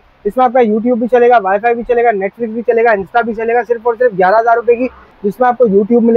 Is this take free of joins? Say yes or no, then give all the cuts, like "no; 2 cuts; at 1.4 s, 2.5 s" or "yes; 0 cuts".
no; 1 cut; at 5.0 s